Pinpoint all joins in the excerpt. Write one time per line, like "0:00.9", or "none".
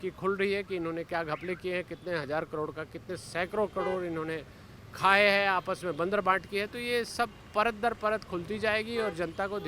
none